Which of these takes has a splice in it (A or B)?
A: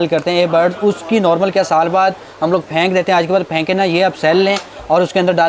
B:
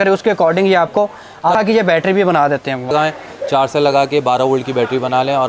B